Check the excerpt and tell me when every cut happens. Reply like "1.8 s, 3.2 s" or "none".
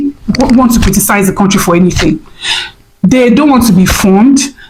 none